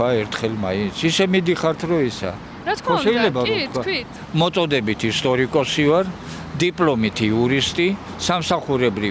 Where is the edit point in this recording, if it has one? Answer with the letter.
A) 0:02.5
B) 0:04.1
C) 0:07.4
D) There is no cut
B